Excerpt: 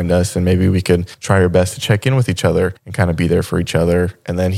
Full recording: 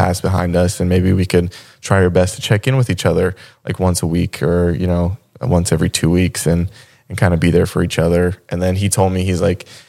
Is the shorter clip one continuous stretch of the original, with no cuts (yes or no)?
no